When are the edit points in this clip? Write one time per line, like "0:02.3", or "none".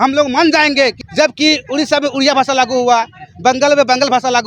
0:01.0